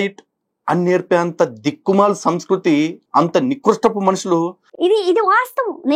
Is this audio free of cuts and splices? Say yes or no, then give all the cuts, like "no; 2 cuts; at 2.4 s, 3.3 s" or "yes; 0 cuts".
no; 1 cut; at 4.7 s